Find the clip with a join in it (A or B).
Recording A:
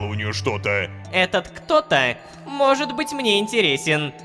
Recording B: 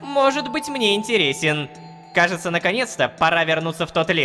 A